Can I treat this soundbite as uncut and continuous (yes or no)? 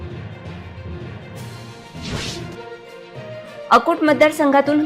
yes